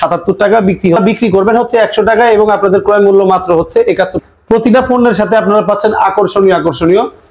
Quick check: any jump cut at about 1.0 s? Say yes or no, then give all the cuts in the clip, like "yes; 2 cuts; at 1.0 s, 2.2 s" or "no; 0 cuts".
yes; 2 cuts; at 1.0 s, 4.2 s